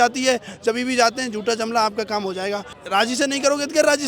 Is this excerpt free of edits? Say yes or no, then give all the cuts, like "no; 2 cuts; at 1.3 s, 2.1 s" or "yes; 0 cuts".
no; 1 cut; at 2.8 s